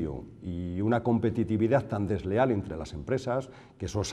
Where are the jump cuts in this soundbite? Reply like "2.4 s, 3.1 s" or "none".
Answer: none